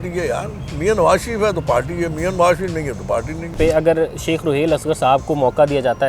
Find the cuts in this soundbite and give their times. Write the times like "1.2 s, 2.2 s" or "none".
3.5 s

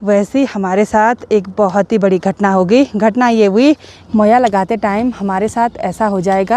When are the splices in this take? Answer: 3.9 s

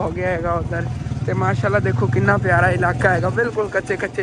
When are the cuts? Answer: none

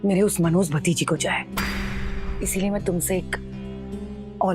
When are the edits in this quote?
2.2 s

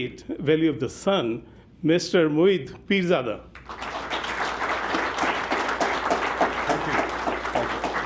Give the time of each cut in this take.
none

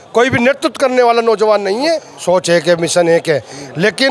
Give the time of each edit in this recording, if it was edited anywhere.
2.1 s

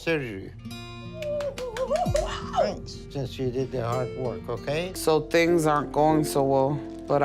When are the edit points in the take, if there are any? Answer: 4.9 s

